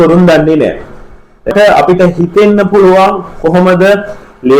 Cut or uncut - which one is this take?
cut